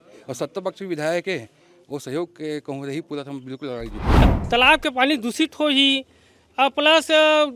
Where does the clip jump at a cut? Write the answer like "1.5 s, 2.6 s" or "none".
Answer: 4.2 s